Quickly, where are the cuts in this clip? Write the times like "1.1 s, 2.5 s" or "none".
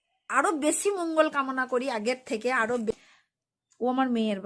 2.9 s